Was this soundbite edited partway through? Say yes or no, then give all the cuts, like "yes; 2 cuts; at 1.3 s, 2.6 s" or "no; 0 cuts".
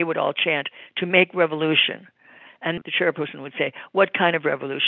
yes; 1 cut; at 2.8 s